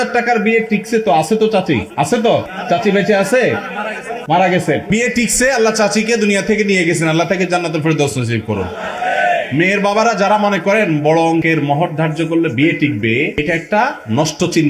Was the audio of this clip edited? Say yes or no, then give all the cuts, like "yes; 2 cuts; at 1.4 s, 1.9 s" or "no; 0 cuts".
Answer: no; 0 cuts